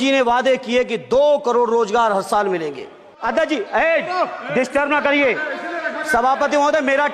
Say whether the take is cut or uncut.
cut